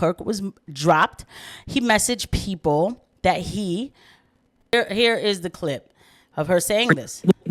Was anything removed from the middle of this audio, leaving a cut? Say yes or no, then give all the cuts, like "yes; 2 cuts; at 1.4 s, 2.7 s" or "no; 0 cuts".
yes; 1 cut; at 4.7 s